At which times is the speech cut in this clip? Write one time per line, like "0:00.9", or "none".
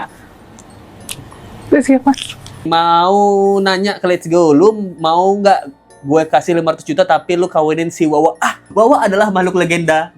0:02.7
0:08.5